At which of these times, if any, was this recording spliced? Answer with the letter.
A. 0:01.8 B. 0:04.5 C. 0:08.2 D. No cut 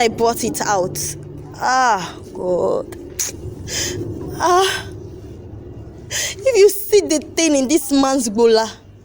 D